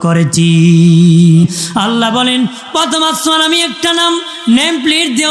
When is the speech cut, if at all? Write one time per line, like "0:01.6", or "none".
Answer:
0:01.4